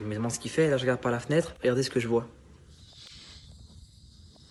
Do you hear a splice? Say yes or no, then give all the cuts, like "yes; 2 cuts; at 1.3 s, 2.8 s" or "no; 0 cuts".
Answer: no; 0 cuts